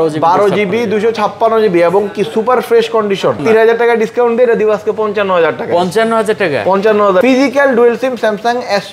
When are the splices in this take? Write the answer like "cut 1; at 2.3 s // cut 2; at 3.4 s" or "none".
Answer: cut 1; at 3.4 s // cut 2; at 7.2 s